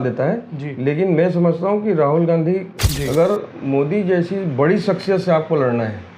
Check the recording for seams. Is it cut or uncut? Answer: cut